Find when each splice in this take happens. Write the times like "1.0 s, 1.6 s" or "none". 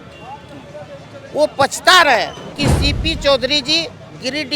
2.5 s